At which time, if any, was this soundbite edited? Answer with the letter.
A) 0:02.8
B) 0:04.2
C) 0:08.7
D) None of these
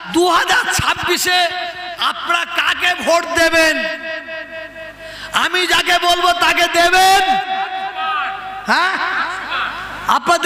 D